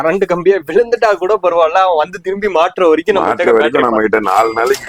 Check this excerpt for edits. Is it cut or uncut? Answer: uncut